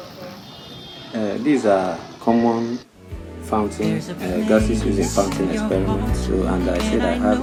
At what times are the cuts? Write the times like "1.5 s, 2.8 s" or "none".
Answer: none